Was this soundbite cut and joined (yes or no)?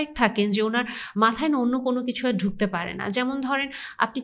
no